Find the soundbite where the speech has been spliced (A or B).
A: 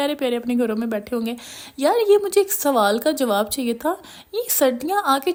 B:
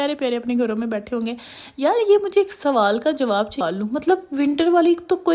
B